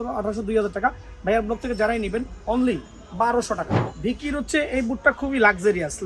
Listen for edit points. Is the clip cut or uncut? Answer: cut